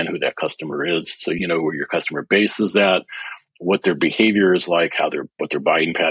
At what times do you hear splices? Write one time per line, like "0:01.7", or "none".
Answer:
0:01.4